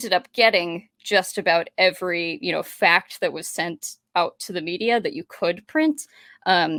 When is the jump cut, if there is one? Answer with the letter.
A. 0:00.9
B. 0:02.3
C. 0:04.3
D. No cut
D